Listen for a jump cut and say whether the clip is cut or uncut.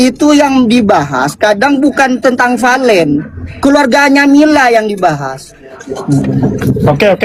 uncut